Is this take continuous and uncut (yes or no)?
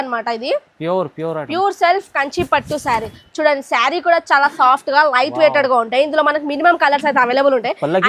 yes